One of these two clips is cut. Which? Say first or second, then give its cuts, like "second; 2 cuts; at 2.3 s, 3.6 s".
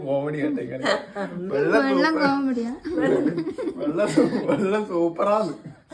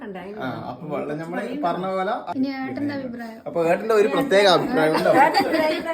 second; 1 cut; at 2.3 s